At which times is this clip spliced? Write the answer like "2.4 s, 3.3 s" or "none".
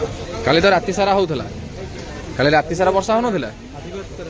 none